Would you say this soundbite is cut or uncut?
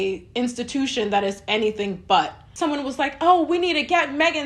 cut